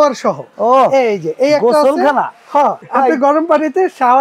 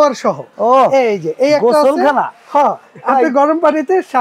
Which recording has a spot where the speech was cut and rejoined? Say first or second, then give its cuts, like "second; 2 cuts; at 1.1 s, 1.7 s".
first; 1 cut; at 2.8 s